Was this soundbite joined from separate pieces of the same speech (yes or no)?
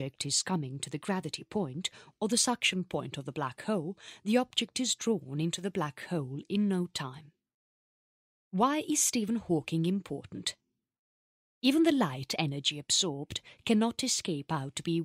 yes